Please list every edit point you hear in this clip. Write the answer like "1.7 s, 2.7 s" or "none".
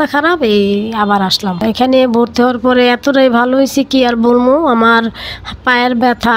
1.6 s